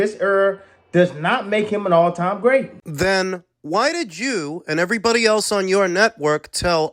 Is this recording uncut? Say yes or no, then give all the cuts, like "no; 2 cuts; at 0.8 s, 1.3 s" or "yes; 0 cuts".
yes; 0 cuts